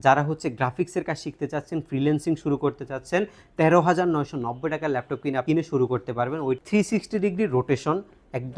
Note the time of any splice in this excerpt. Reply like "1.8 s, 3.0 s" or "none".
6.6 s